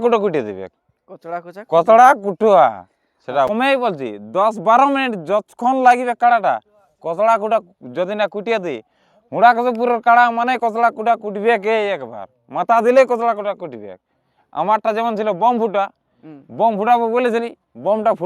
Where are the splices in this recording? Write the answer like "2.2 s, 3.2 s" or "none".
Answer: 3.5 s

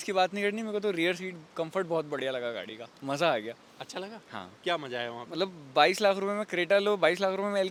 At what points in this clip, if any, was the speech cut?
none

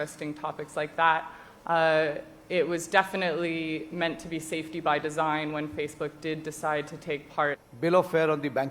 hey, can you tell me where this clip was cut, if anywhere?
7.7 s

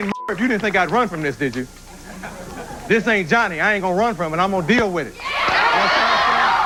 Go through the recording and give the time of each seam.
none

